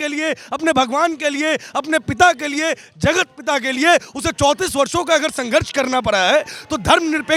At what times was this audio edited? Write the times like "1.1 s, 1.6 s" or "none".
none